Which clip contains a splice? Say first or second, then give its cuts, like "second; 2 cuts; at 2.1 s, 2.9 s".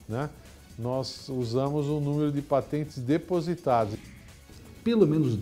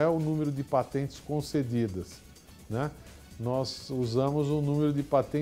first; 1 cut; at 4.1 s